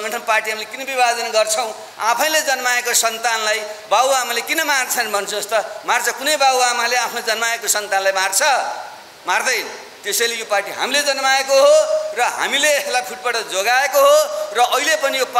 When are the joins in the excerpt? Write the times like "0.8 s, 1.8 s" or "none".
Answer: none